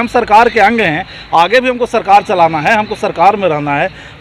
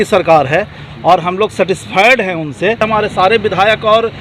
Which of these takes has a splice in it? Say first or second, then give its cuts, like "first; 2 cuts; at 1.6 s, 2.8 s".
second; 1 cut; at 2.8 s